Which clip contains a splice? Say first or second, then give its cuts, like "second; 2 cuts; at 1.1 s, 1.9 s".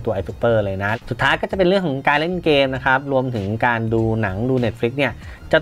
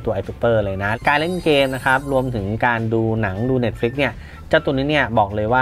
second; 1 cut; at 1.0 s